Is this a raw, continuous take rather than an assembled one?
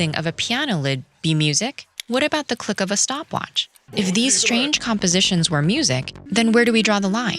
no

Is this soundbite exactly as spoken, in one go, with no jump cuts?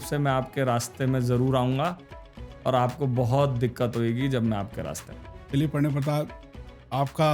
yes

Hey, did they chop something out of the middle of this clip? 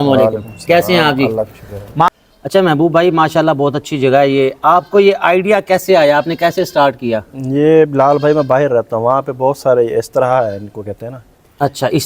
yes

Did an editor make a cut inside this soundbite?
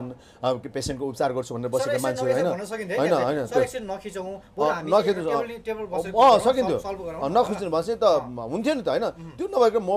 no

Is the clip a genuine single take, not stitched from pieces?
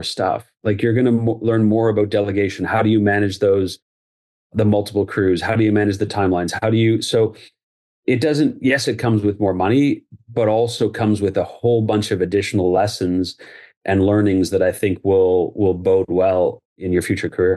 no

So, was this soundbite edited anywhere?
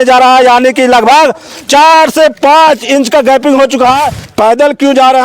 yes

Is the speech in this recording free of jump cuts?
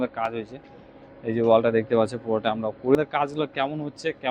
no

